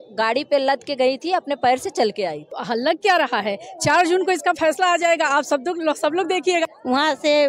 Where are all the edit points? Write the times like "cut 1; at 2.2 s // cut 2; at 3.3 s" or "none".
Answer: cut 1; at 2.5 s // cut 2; at 6.7 s